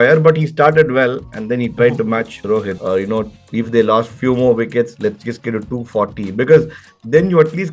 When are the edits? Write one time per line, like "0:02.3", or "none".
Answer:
0:02.7